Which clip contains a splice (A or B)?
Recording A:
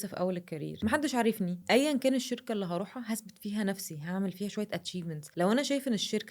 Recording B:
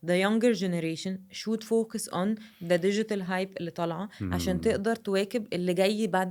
A